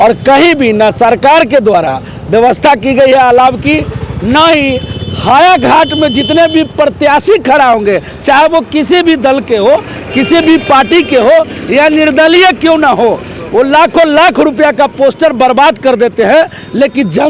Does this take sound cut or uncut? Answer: uncut